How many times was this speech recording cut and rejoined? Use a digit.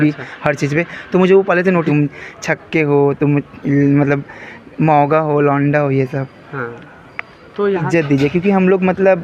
2